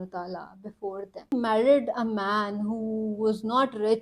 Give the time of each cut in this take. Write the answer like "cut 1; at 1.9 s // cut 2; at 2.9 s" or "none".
cut 1; at 1.3 s